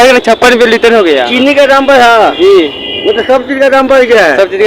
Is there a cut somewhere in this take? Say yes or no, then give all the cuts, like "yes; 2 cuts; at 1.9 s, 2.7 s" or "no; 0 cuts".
no; 0 cuts